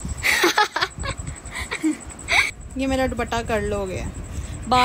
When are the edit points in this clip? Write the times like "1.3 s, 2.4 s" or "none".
2.5 s